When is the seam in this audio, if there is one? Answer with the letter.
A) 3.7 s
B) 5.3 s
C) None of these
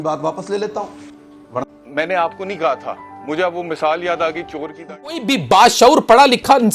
B